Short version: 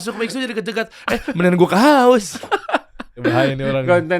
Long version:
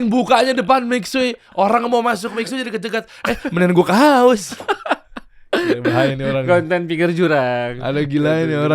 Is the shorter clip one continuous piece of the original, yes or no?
no